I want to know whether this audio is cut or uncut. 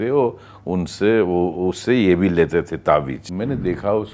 cut